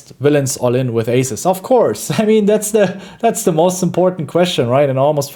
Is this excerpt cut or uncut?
uncut